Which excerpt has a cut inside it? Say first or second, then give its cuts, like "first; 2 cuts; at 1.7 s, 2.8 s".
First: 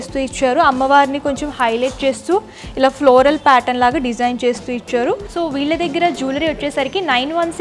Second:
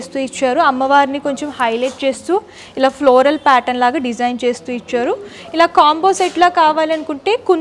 first; 1 cut; at 5.3 s